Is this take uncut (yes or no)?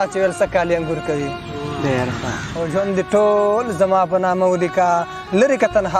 no